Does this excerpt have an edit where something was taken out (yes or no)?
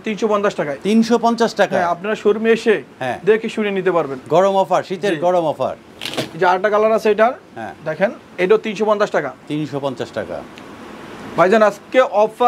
no